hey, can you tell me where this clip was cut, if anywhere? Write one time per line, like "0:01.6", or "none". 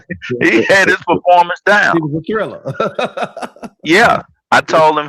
none